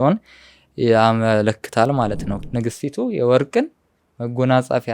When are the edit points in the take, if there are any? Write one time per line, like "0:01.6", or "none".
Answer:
0:02.4